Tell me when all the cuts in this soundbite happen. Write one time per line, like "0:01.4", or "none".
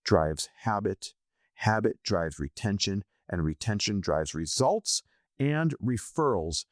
none